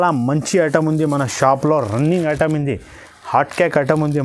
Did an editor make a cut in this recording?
no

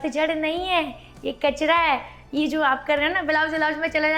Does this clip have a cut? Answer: no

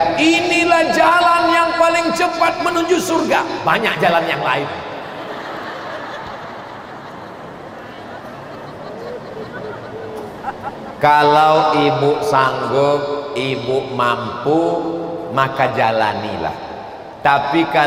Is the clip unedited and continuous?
yes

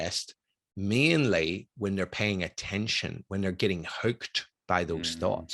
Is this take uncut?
yes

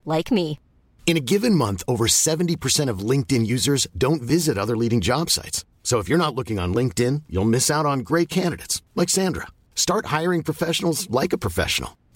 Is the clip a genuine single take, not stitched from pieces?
yes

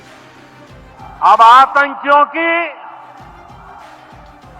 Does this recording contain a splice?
yes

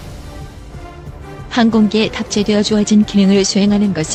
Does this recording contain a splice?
no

